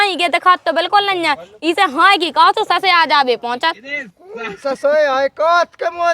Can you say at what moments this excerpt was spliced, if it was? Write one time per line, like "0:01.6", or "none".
0:04.2